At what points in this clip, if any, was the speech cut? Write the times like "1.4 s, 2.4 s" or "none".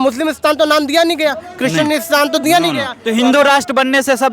3.0 s

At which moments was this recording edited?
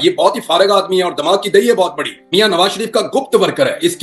2.2 s

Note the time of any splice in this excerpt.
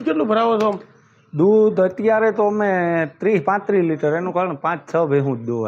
none

